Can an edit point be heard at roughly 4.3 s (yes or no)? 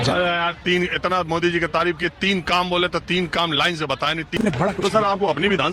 yes